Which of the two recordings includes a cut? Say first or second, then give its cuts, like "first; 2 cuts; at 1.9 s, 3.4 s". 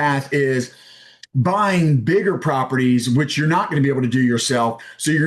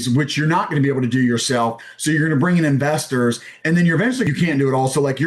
second; 1 cut; at 4.3 s